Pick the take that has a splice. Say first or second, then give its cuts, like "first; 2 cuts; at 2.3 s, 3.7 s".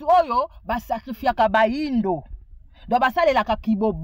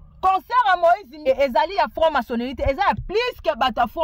second; 1 cut; at 1.1 s